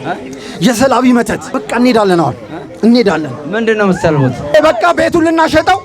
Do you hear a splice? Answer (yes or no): yes